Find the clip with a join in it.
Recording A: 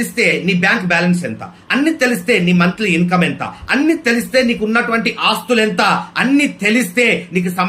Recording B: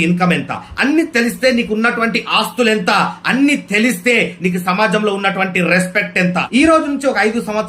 B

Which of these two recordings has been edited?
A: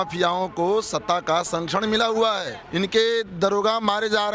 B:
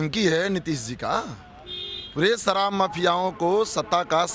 A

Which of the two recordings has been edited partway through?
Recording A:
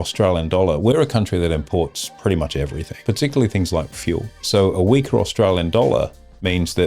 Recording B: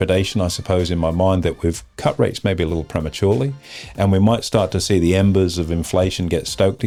A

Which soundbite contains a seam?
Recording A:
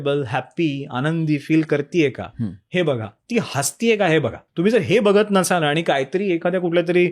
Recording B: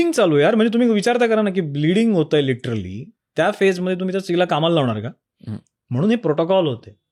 A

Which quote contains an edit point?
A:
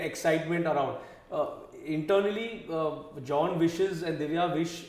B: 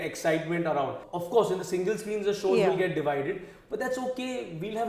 B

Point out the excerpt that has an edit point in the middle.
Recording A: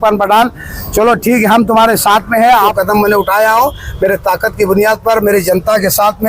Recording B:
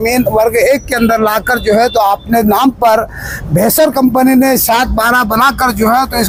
A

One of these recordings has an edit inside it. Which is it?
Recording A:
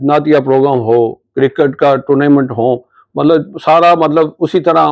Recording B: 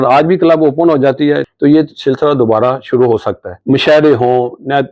B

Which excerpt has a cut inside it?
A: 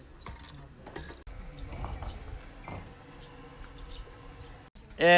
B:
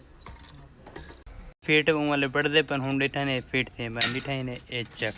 B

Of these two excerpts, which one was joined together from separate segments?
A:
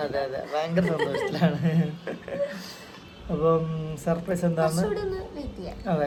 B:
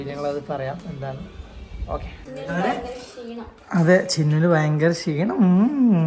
B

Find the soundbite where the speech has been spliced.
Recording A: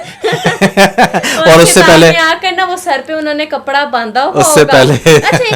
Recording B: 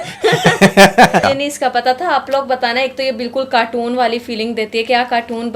B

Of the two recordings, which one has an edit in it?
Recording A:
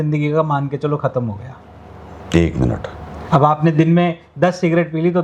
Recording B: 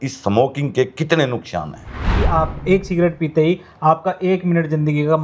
B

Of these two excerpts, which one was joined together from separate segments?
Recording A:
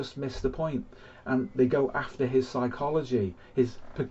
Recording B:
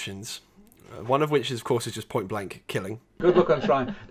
B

